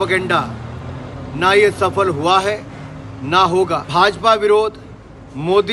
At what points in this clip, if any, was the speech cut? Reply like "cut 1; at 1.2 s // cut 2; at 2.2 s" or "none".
cut 1; at 3.9 s